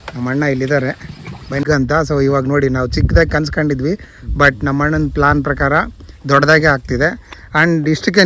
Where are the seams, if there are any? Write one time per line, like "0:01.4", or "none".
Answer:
0:01.6